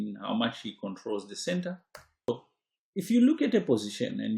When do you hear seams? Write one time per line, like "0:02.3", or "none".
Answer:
0:02.3